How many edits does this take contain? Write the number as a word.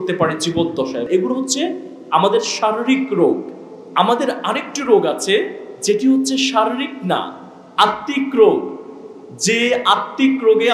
one